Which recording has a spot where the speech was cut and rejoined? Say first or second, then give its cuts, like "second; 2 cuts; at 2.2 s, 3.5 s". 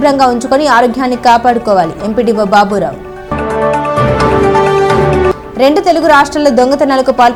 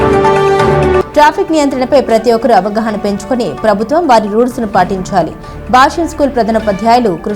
second; 1 cut; at 1.0 s